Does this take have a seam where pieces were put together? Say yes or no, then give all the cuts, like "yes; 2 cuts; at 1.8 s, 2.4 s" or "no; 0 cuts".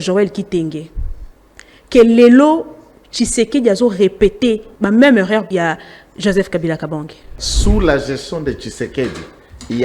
yes; 3 cuts; at 4.7 s, 5.5 s, 7.4 s